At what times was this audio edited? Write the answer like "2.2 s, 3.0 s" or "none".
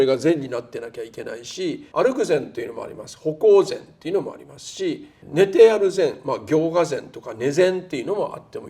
1.8 s, 5.2 s